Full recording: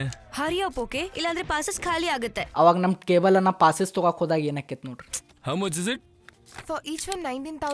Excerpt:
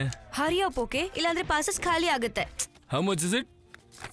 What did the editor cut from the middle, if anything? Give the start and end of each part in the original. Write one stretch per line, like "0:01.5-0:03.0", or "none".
0:02.4-0:05.0